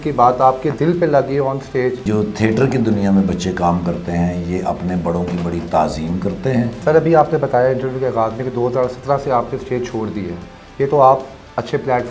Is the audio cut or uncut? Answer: cut